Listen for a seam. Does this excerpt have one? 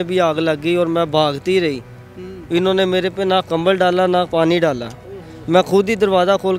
no; 0 cuts

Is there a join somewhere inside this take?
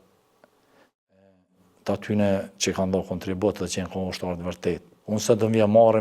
yes; 1 cut; at 4.9 s

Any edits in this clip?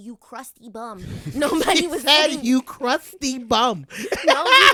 no; 0 cuts

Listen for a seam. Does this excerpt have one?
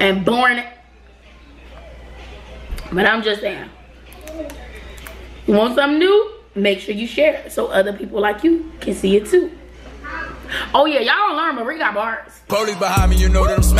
yes; 1 cut; at 12.3 s

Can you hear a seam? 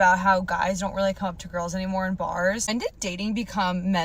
yes; 1 cut; at 2.6 s

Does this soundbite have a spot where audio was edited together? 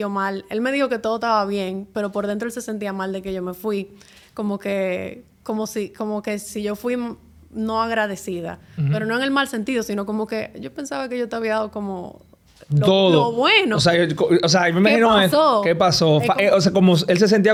no; 0 cuts

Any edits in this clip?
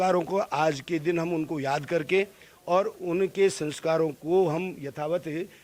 no; 0 cuts

